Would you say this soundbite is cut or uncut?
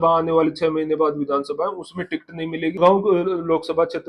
cut